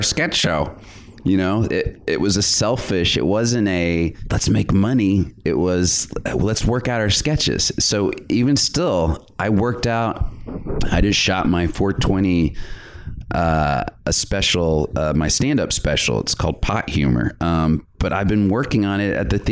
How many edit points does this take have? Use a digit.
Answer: 1